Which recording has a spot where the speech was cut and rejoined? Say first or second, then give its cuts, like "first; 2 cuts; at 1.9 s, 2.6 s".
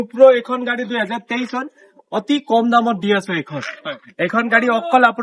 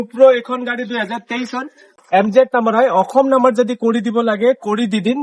second; 1 cut; at 2.0 s